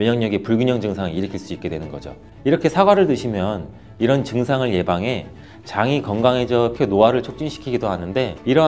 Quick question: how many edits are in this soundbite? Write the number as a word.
one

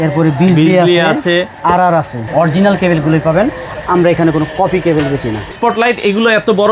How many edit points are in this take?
two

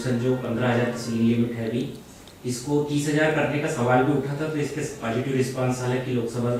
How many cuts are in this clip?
zero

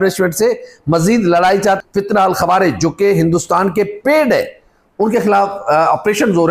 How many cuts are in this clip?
one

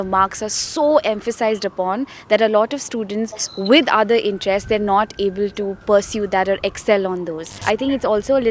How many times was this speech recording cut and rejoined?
one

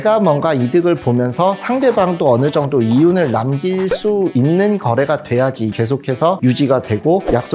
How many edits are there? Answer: zero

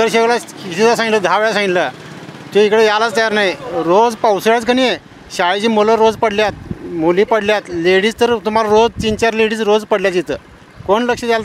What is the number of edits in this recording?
zero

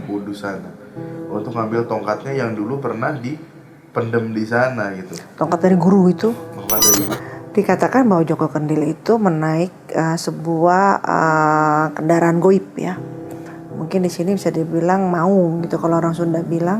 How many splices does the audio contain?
one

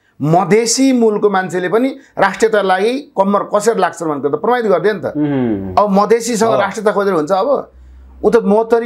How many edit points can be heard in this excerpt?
zero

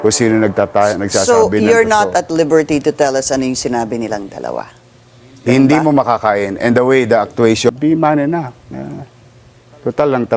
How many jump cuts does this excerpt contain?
one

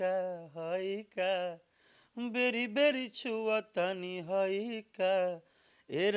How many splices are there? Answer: zero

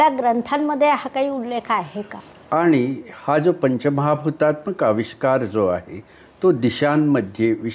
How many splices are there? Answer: one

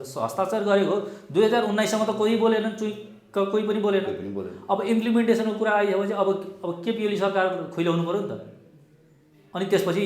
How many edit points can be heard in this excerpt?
zero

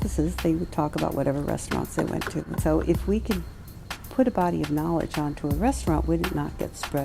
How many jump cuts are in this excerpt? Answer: one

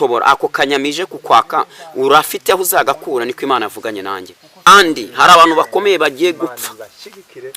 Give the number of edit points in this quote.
one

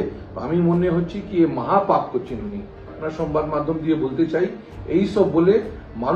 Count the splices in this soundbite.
one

